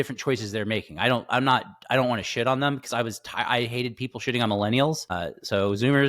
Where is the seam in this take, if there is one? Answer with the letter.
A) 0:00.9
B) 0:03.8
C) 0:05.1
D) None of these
C